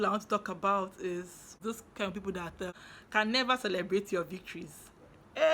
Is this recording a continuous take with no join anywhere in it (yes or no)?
no